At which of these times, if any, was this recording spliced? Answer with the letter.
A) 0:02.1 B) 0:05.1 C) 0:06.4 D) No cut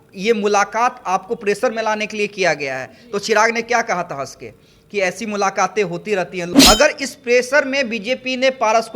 C